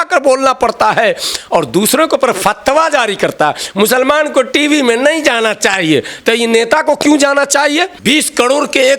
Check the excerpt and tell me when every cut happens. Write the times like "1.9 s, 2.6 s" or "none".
7.9 s